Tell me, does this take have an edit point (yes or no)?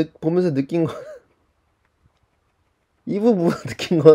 yes